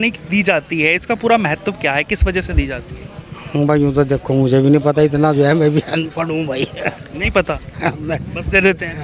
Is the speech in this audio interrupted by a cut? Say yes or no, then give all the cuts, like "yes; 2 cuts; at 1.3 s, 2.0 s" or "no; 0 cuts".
no; 0 cuts